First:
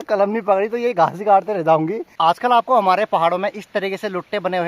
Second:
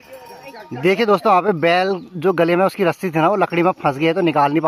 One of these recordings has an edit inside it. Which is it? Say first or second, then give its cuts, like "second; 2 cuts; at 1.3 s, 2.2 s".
first; 1 cut; at 2.0 s